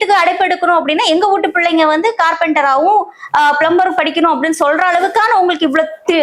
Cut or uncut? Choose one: uncut